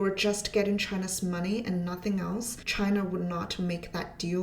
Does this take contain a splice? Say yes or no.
yes